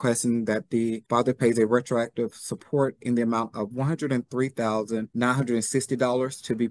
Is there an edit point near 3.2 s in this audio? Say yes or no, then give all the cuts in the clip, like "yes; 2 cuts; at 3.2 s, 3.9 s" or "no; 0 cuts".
no; 2 cuts; at 1.0 s, 5.1 s